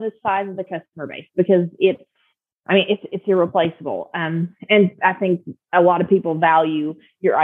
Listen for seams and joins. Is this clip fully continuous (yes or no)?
yes